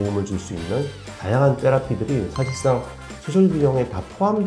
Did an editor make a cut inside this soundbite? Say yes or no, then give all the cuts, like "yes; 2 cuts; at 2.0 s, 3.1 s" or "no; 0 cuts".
no; 0 cuts